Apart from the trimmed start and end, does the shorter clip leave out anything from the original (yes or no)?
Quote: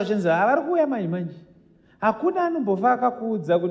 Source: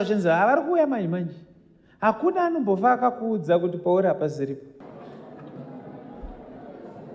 no